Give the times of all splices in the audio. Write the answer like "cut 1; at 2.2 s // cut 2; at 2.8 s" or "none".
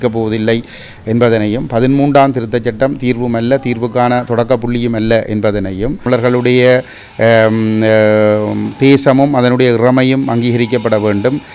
cut 1; at 6.0 s